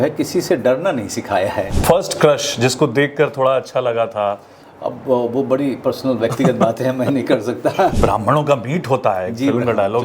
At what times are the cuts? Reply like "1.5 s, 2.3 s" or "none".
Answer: 1.7 s, 7.9 s